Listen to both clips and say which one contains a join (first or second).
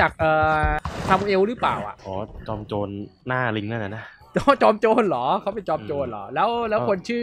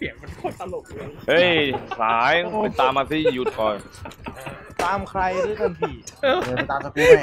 first